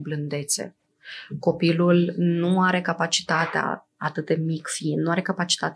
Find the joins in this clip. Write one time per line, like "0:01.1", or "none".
none